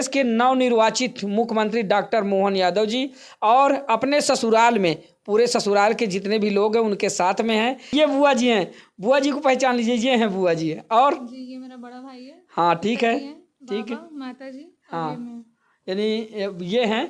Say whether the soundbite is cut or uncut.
cut